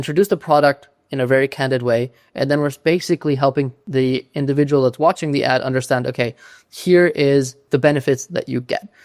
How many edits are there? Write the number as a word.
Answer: two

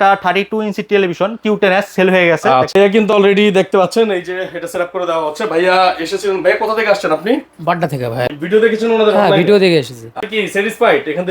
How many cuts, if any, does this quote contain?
three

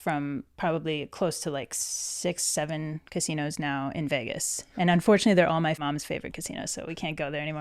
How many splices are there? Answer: one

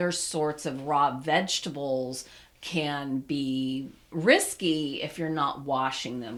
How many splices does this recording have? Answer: zero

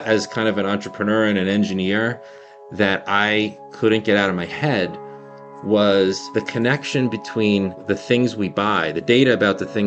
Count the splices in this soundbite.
two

